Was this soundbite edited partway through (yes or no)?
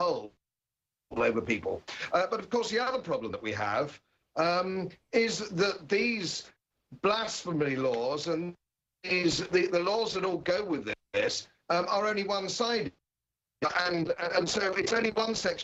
no